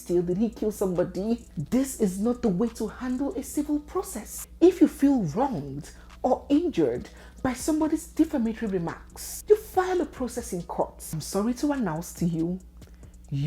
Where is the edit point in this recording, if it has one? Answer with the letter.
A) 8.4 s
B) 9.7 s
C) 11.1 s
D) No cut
C